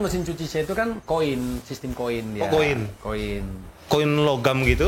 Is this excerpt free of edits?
no; 2 cuts; at 1.0 s, 3.8 s

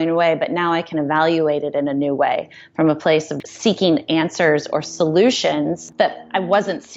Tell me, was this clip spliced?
yes; 2 cuts; at 3.3 s, 5.8 s

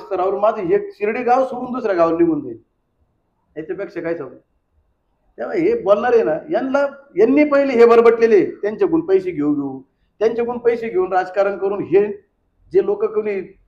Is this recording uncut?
yes; 0 cuts

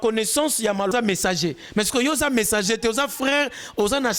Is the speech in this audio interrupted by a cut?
yes; 1 cut; at 0.9 s

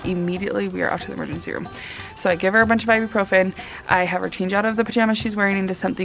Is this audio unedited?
yes; 0 cuts

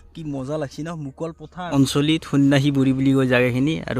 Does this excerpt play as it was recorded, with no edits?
no; 1 cut; at 1.6 s

